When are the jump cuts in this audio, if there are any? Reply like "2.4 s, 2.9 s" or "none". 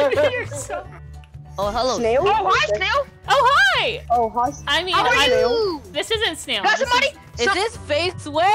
1.2 s, 4.0 s

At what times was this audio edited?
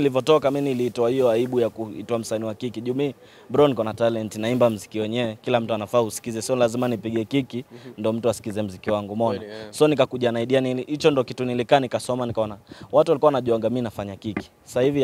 none

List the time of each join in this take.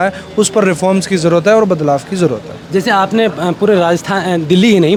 none

